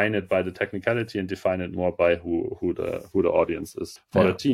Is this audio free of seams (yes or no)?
yes